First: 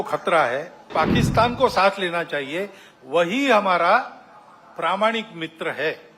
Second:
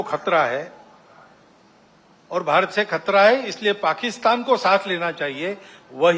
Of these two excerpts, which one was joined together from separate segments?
first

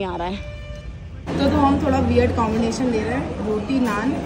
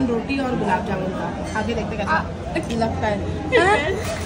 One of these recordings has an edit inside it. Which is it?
first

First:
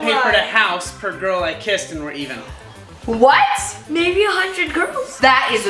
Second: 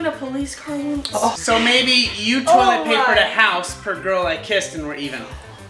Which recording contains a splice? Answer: second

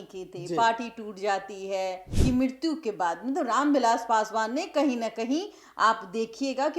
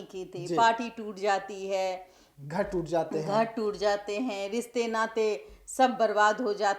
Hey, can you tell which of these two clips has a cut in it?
first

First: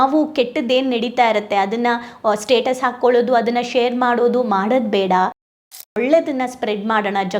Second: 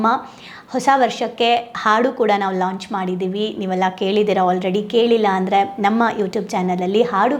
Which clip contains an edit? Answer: first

